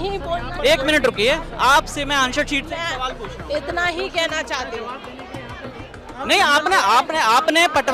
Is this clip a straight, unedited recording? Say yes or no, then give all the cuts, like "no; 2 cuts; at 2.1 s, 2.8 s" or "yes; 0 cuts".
yes; 0 cuts